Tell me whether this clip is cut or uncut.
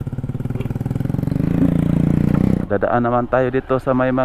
cut